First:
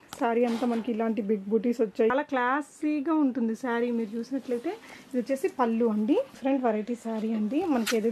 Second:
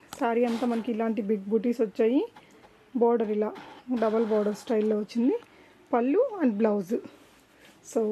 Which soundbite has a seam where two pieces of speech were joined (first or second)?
first